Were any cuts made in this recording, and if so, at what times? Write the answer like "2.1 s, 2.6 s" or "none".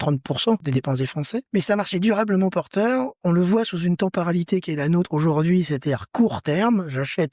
1.0 s